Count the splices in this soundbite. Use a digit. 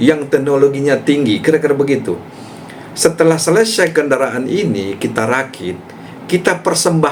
0